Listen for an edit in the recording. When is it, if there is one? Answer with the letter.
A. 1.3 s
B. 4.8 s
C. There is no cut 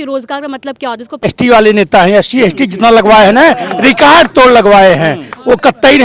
A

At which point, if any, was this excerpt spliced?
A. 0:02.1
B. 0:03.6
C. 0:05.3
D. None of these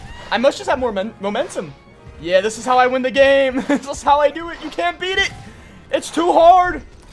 D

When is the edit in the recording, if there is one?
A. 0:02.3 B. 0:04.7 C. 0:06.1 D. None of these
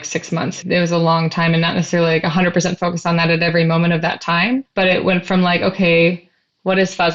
B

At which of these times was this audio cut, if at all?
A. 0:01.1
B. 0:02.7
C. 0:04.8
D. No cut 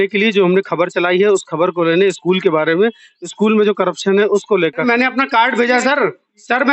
C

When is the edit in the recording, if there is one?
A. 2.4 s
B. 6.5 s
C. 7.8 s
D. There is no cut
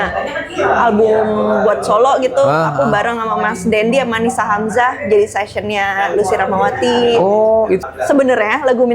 C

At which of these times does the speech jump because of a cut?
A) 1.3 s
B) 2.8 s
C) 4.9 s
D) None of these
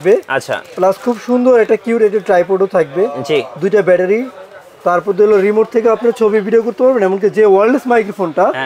D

